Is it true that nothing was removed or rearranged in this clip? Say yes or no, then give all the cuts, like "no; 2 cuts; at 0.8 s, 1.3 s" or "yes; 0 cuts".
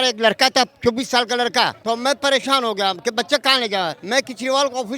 no; 2 cuts; at 1.8 s, 4.0 s